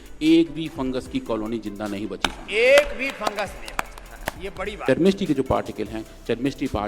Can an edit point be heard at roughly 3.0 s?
no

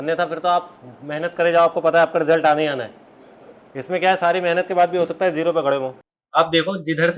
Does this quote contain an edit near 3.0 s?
no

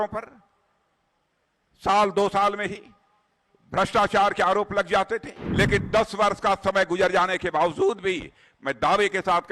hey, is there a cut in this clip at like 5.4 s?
yes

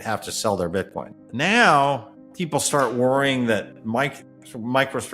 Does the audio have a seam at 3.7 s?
no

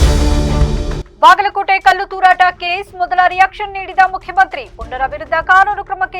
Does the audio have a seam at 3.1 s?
no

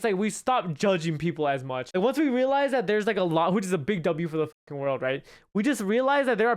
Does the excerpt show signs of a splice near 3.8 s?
no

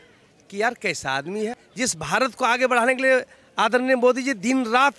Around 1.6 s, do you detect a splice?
yes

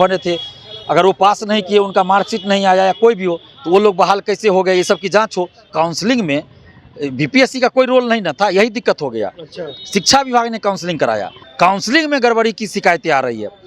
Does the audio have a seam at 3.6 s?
no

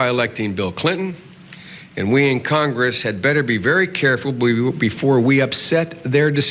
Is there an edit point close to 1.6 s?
no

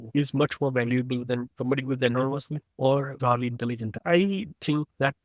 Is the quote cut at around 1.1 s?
no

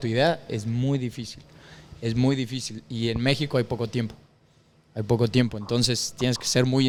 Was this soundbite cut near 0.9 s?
no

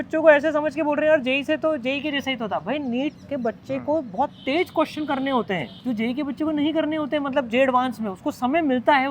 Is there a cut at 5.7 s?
yes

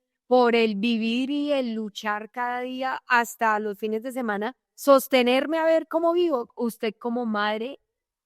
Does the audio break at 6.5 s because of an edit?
yes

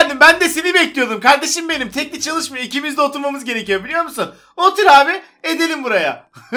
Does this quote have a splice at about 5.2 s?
no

